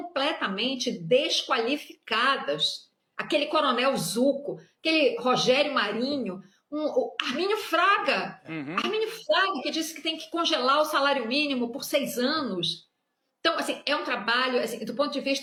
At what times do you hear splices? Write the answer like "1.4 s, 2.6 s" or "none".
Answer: none